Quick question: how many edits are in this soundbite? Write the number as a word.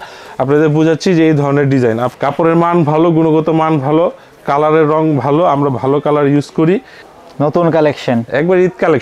two